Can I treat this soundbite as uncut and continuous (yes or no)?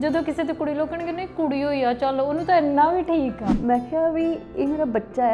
no